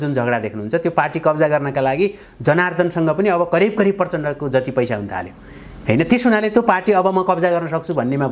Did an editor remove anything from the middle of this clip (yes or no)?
no